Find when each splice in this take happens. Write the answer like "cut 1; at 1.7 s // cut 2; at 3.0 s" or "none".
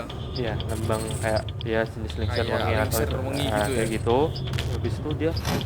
cut 1; at 4.7 s

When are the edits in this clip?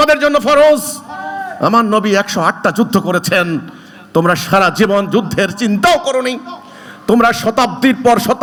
none

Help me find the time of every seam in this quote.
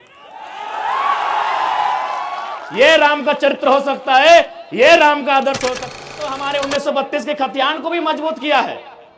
cut 1; at 5.8 s

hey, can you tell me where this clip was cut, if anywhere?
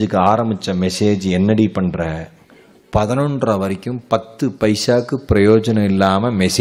none

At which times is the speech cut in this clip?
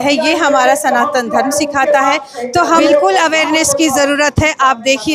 cut 1; at 2.8 s

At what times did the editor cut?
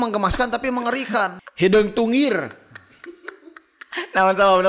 cut 1; at 1.3 s

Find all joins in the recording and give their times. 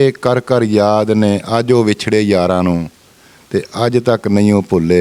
none

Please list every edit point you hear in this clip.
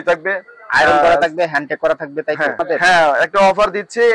cut 1; at 2.6 s

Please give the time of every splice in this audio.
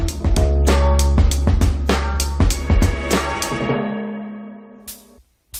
none

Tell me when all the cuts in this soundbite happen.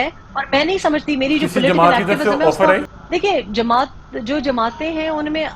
cut 1; at 3.0 s

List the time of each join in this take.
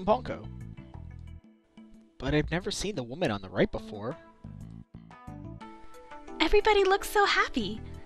cut 1; at 1.3 s

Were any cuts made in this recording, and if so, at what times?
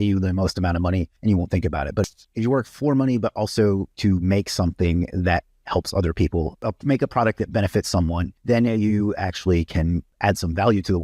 cut 1; at 1.1 s // cut 2; at 2.1 s // cut 3; at 3.9 s // cut 4; at 6.6 s // cut 5; at 8.3 s // cut 6; at 10.1 s

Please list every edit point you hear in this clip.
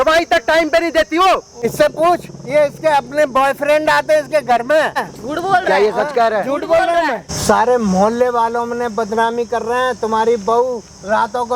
cut 1; at 1.5 s // cut 2; at 5.1 s // cut 3; at 7.3 s

